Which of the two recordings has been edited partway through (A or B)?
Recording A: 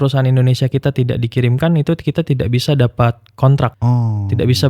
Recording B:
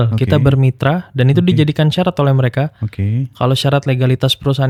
A